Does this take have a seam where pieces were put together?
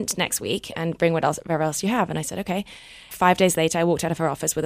yes; 1 cut; at 3.1 s

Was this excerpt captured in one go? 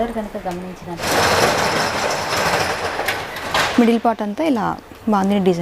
no; 1 cut; at 1.0 s

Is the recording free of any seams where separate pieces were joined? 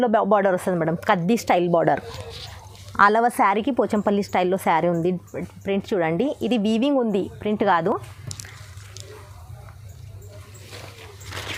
yes; 0 cuts

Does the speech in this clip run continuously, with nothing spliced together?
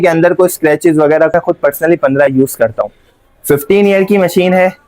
no; 1 cut; at 1.3 s

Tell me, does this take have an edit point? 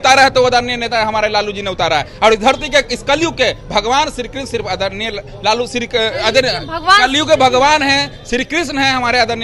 no; 0 cuts

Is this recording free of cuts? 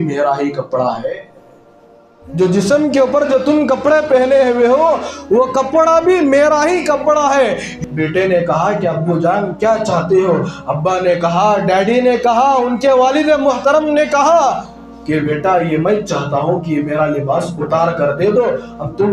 no; 1 cut; at 7.8 s

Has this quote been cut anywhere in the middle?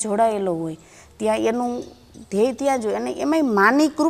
no; 0 cuts

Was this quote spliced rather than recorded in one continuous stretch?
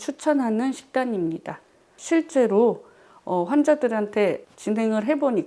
no; 0 cuts

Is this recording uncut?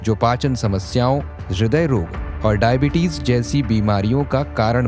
no; 2 cuts; at 1.4 s, 2.2 s

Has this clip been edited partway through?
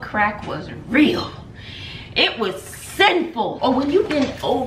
yes; 1 cut; at 3.5 s

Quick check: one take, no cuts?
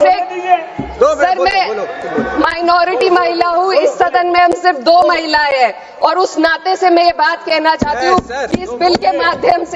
yes; 0 cuts

